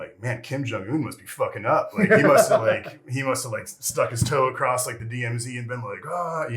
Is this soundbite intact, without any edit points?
yes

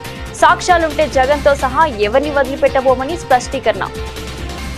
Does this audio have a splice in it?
no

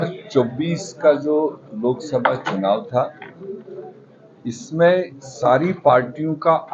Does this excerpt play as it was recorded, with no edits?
yes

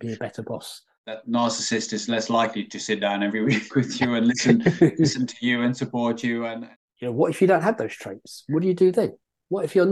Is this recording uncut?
no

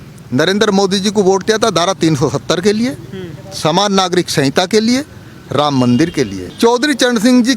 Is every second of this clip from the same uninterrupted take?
no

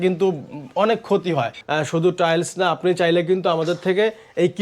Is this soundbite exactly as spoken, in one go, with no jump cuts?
no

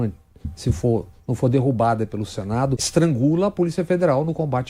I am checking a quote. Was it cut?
yes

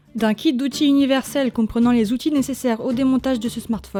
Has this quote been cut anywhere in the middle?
no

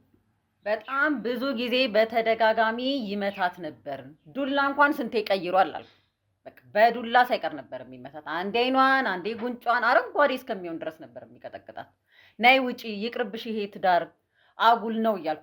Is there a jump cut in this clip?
no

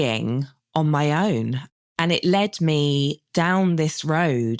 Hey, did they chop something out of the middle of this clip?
yes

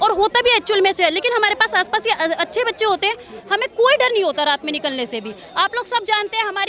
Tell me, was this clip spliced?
no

